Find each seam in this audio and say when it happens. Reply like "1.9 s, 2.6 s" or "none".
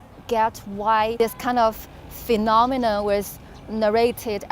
1.1 s

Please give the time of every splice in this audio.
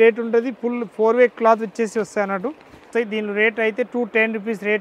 2.9 s

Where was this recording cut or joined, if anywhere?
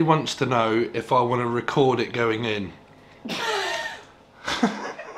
2.9 s

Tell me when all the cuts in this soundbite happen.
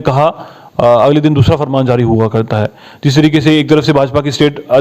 none

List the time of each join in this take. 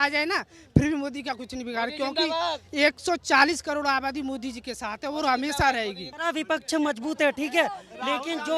6.1 s

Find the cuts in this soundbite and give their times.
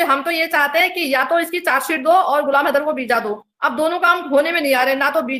none

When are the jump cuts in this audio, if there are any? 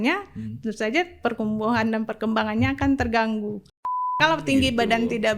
3.6 s

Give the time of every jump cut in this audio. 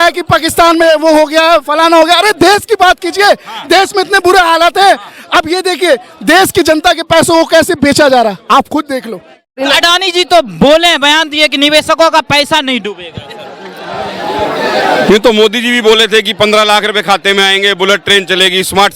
9.6 s

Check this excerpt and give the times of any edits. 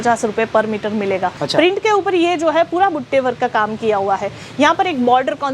1.4 s

